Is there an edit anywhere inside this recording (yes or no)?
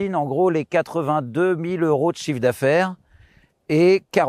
no